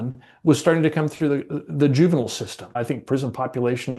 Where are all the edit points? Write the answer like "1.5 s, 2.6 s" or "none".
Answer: 2.8 s